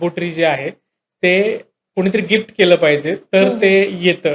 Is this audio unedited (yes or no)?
yes